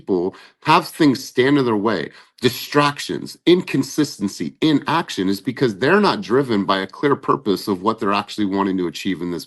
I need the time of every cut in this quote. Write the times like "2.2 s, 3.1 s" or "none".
none